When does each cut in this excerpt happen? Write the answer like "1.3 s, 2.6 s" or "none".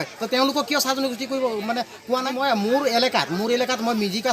2.3 s